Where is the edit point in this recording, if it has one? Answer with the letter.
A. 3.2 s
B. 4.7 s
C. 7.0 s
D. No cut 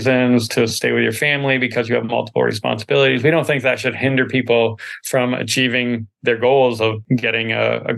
C